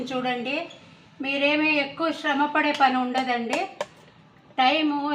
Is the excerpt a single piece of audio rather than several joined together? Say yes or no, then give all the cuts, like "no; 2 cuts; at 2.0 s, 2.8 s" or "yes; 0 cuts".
yes; 0 cuts